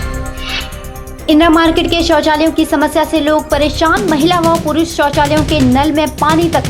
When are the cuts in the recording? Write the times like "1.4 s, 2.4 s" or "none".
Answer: 0.9 s